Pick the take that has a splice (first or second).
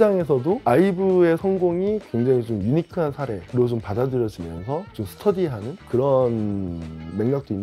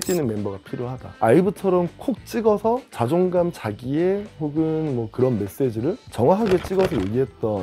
second